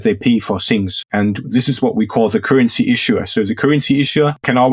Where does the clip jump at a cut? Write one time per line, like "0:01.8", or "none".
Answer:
0:00.9